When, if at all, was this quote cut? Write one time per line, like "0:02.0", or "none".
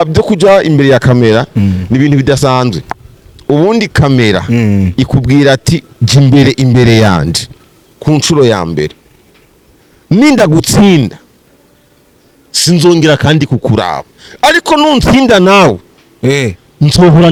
none